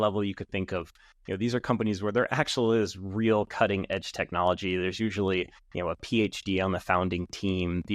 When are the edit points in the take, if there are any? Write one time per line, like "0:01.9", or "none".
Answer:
0:05.6